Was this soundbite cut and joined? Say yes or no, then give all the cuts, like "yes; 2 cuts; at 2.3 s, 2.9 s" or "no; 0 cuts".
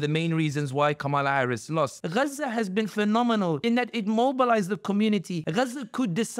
yes; 3 cuts; at 2.0 s, 3.6 s, 5.4 s